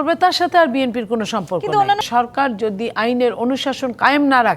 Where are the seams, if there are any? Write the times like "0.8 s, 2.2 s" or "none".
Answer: 2.0 s

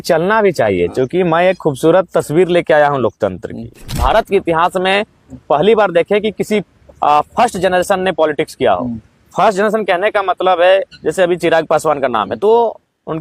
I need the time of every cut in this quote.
3.8 s

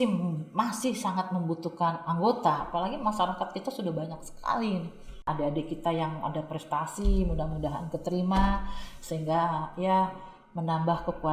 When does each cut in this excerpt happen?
5.3 s

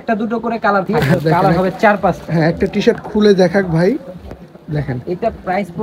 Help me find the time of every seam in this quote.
1.0 s

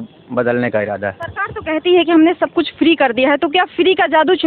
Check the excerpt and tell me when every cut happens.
none

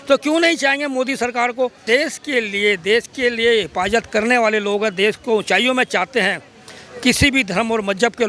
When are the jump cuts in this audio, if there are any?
1.8 s

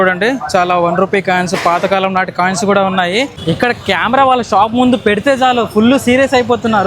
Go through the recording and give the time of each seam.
3.3 s

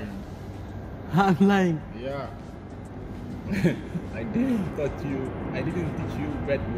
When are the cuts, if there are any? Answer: none

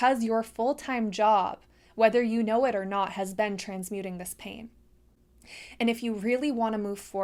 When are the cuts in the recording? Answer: none

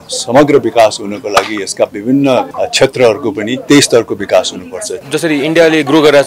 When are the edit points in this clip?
2.5 s, 3.6 s, 5.0 s

